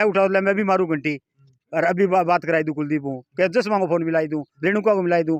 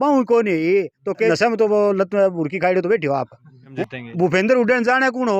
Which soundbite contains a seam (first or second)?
second